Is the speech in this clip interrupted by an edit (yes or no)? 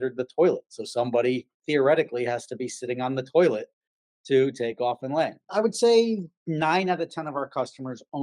yes